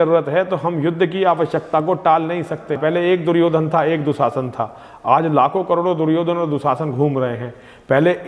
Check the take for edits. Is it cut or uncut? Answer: cut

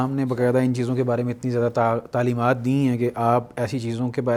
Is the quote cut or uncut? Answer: uncut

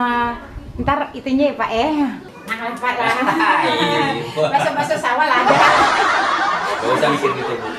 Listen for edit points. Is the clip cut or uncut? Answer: uncut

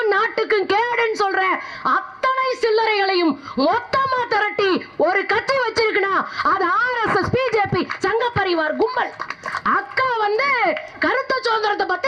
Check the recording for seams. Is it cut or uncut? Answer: uncut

